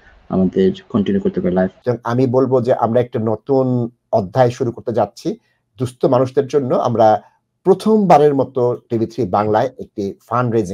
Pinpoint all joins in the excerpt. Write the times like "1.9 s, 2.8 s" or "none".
1.8 s

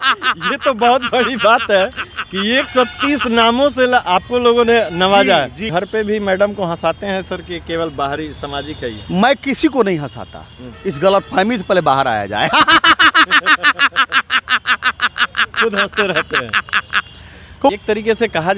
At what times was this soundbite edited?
5.6 s, 17.7 s

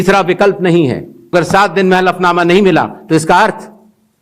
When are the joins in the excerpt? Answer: 1.3 s

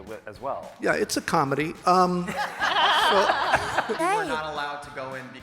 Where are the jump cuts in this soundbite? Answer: 4.0 s

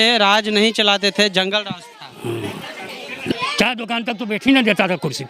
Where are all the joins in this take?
3.3 s

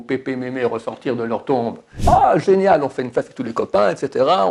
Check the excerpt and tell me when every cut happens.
2.0 s

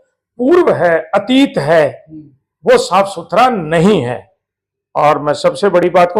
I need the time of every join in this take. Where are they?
none

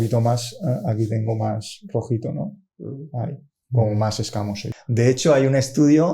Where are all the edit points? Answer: 4.6 s

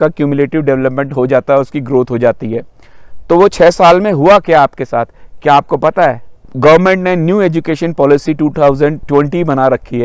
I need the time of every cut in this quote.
6.4 s, 9.0 s

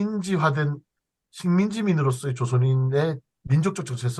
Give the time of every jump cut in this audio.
none

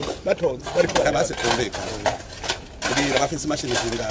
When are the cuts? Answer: 1.1 s

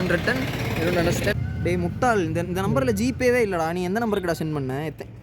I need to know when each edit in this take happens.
1.3 s

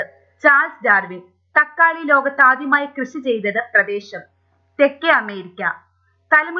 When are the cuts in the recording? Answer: 1.7 s

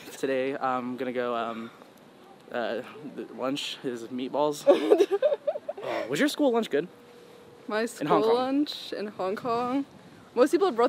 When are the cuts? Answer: none

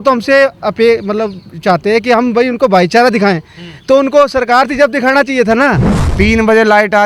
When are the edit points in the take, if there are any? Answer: 5.9 s

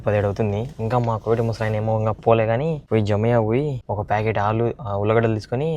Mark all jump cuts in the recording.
2.8 s, 3.8 s

